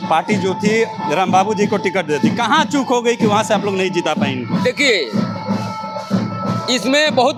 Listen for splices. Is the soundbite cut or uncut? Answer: uncut